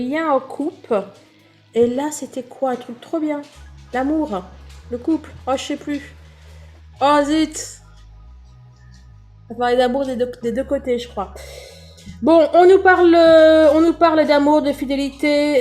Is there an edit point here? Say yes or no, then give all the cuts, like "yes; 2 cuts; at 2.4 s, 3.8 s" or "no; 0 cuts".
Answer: yes; 2 cuts; at 7.7 s, 9.5 s